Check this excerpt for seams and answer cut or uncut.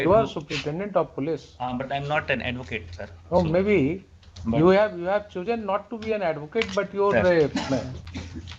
uncut